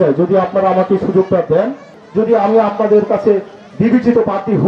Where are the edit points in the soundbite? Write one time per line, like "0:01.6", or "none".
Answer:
0:01.9